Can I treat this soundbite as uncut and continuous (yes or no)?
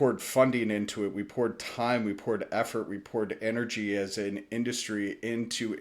yes